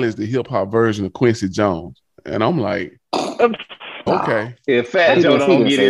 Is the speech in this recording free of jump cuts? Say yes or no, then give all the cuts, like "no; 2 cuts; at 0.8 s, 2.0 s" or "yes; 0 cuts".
no; 1 cut; at 4.1 s